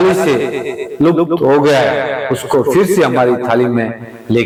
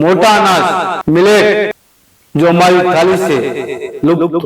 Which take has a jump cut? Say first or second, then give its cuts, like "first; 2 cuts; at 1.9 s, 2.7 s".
second; 2 cuts; at 0.9 s, 1.8 s